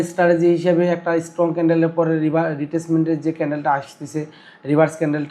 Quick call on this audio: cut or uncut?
uncut